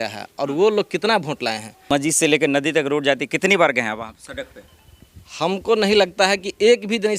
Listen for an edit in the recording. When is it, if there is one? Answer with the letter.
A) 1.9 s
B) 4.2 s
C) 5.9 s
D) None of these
A